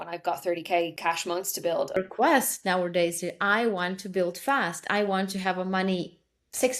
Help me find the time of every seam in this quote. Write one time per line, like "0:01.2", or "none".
0:00.9
0:01.9